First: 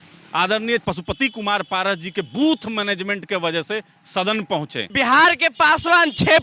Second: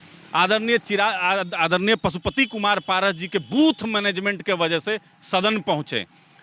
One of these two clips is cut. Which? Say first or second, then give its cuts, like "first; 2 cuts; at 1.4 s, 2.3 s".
first; 2 cuts; at 0.8 s, 4.9 s